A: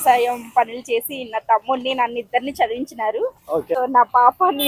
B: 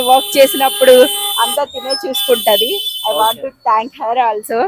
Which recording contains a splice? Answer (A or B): A